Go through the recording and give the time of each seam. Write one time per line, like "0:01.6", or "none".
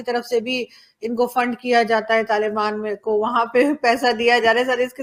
none